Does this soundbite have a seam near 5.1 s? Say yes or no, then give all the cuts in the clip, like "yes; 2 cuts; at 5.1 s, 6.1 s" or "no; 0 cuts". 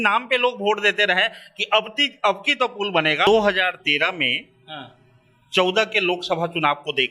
no; 1 cut; at 3.3 s